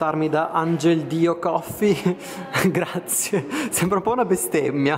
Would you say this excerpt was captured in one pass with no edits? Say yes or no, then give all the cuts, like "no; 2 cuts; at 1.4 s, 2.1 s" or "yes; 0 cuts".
yes; 0 cuts